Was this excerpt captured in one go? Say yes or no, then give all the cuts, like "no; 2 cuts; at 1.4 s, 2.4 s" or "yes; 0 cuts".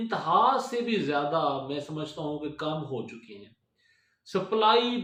yes; 0 cuts